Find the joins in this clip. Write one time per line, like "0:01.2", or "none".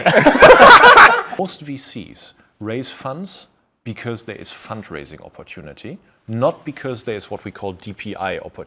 0:01.4